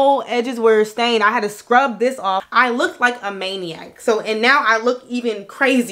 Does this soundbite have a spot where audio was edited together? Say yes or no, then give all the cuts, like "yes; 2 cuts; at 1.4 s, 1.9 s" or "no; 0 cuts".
yes; 1 cut; at 2.5 s